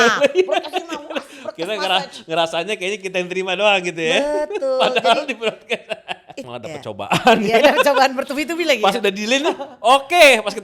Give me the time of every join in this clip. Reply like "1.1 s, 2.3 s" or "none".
6.5 s